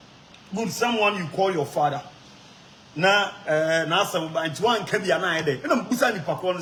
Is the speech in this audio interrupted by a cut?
no; 0 cuts

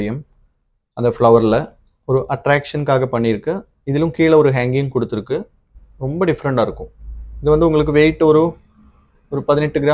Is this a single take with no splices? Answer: yes; 0 cuts

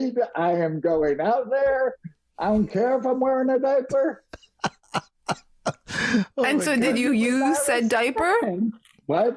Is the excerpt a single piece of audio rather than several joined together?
yes; 0 cuts

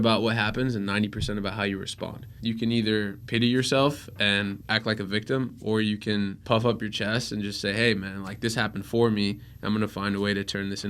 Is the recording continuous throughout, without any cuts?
no; 4 cuts; at 2.3 s, 3.2 s, 4.6 s, 6.4 s

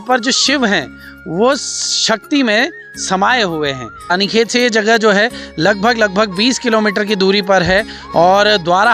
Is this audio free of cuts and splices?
no; 1 cut; at 4.1 s

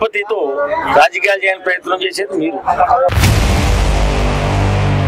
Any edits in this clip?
yes; 1 cut; at 3.1 s

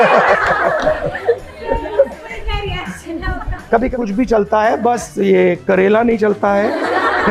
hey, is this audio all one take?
no; 1 cut; at 3.9 s

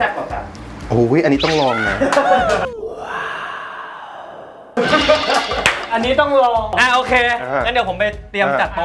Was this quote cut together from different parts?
no; 0 cuts

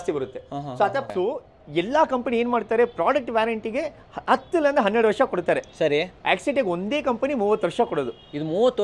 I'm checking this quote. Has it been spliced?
yes; 1 cut; at 1.1 s

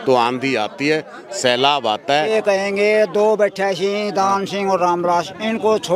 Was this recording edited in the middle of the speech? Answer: yes; 1 cut; at 2.3 s

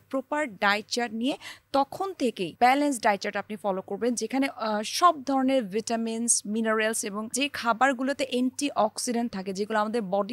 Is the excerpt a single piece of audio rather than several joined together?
no; 2 cuts; at 2.5 s, 7.3 s

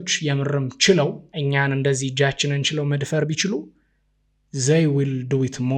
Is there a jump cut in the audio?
yes; 1 cut; at 1.3 s

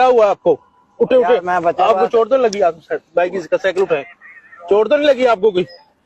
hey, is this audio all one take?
yes; 0 cuts

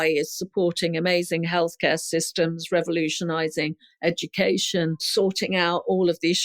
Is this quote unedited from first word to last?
no; 1 cut; at 5.1 s

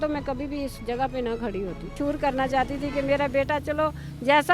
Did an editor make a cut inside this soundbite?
yes; 1 cut; at 1.9 s

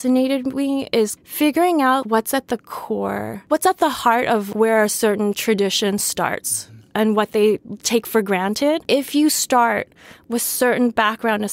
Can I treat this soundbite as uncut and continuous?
no; 1 cut; at 4.5 s

